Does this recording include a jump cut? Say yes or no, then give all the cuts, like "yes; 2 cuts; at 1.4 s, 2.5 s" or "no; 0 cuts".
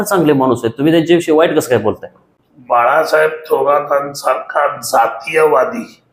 no; 0 cuts